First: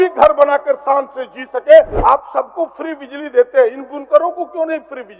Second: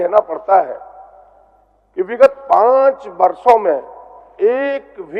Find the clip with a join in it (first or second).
first